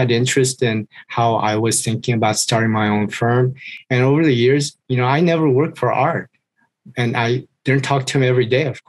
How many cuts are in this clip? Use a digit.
0